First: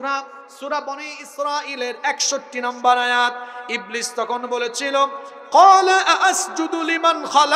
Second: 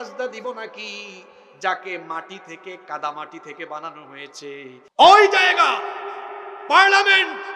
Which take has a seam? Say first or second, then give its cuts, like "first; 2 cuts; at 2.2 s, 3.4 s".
second; 1 cut; at 4.8 s